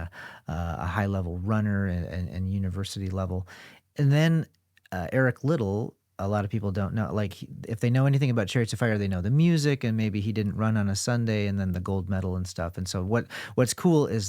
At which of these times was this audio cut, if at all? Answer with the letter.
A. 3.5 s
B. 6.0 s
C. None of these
C